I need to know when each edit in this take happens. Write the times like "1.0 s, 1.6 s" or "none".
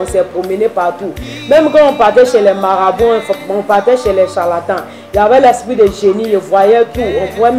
none